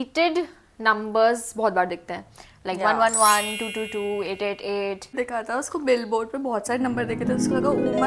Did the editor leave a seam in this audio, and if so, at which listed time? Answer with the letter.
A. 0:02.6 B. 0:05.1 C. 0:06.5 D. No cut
B